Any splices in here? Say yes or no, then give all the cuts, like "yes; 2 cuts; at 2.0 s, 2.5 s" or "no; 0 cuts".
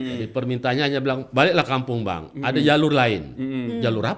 no; 0 cuts